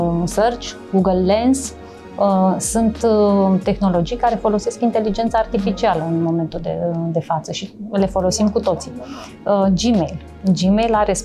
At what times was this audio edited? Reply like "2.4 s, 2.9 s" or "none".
none